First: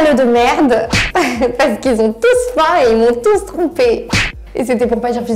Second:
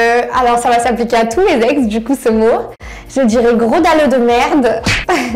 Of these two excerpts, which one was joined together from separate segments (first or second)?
second